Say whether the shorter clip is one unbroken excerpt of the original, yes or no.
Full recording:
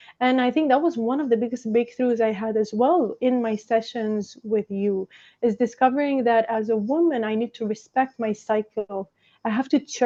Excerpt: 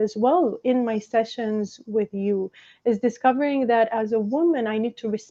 yes